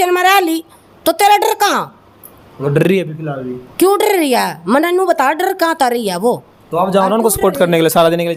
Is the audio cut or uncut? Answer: uncut